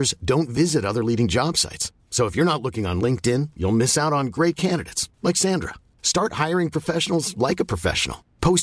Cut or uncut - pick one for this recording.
uncut